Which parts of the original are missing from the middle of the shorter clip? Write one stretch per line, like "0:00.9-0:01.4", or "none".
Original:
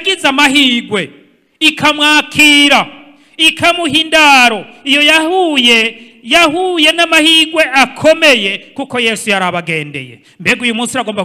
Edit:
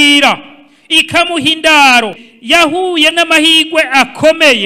0:04.7-0:06.1